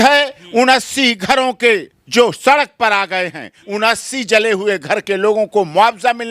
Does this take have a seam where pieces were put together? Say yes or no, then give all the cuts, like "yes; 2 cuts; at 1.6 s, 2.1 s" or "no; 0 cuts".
yes; 2 cuts; at 2.0 s, 3.5 s